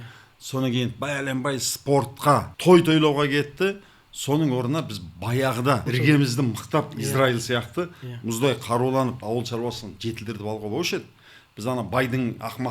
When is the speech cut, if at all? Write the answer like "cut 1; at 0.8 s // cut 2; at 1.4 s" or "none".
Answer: cut 1; at 2.5 s // cut 2; at 5.9 s // cut 3; at 9.2 s